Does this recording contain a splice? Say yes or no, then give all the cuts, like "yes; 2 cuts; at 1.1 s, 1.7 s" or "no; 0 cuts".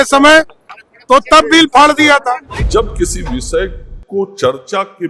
yes; 1 cut; at 2.5 s